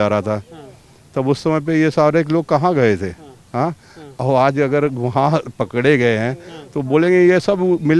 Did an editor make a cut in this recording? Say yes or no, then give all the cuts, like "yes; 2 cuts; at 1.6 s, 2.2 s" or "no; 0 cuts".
no; 0 cuts